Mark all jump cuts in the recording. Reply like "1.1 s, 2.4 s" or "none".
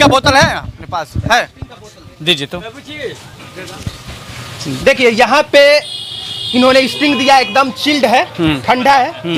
none